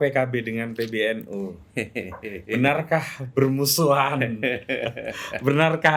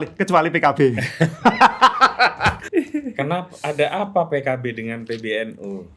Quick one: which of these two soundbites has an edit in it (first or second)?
second